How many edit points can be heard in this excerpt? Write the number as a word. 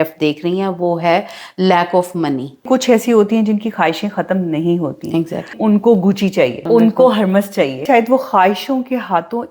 four